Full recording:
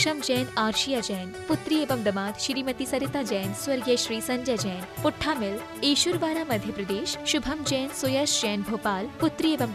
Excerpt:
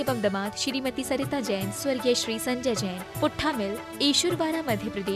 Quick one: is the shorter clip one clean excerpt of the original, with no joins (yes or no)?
yes